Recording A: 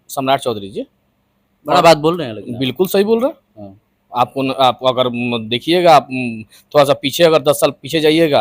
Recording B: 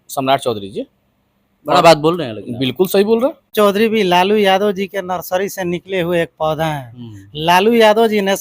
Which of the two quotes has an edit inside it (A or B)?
B